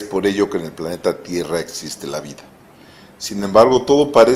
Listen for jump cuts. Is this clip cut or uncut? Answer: uncut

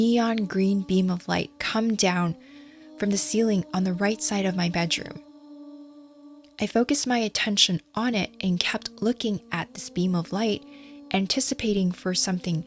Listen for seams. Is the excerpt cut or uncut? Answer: uncut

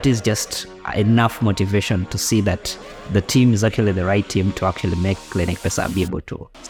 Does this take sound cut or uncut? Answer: uncut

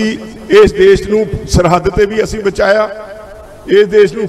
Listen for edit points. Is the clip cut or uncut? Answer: uncut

